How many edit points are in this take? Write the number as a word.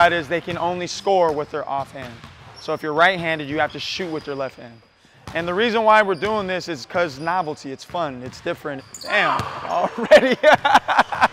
one